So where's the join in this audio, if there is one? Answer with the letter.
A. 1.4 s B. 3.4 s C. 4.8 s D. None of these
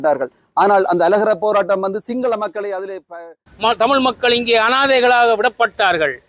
B